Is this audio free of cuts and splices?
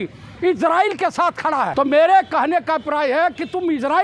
no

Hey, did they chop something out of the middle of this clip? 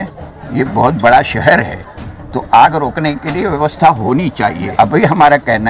yes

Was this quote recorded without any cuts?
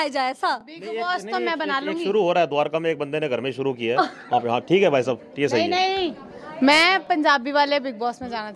yes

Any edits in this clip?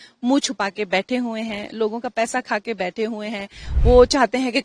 yes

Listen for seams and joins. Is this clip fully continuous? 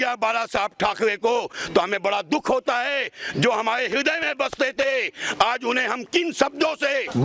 yes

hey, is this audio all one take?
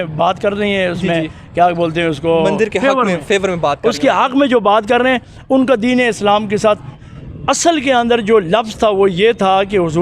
no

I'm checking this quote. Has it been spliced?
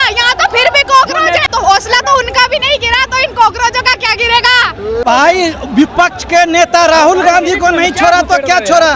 no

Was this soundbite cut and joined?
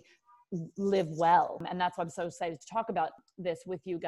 yes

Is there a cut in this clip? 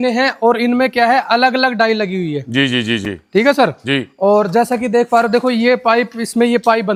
no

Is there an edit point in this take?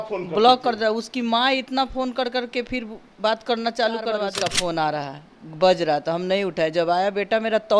yes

